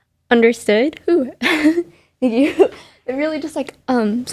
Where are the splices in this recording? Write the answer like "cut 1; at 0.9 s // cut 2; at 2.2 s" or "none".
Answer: none